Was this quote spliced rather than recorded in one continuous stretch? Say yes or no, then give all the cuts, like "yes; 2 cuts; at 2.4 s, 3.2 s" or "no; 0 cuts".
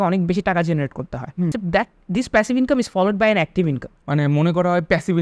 yes; 2 cuts; at 1.6 s, 3.9 s